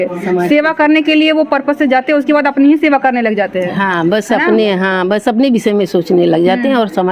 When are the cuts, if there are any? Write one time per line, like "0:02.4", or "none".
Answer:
none